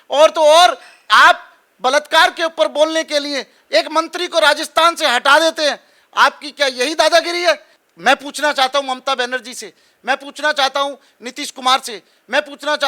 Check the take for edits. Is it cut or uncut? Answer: cut